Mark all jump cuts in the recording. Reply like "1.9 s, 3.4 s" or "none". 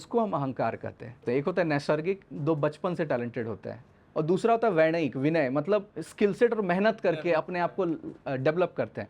1.2 s